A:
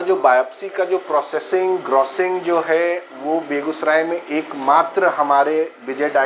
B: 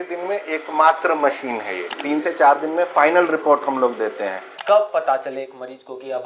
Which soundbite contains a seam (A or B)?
B